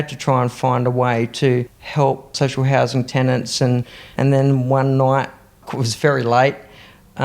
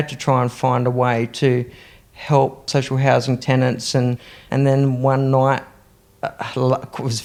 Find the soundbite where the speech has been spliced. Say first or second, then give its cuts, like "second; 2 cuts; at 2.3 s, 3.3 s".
first; 2 cuts; at 1.8 s, 5.7 s